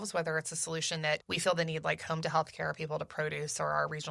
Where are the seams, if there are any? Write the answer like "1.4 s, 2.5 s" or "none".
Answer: 1.3 s